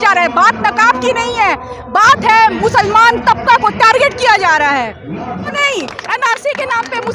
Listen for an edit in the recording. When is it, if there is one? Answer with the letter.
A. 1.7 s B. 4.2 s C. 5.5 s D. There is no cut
C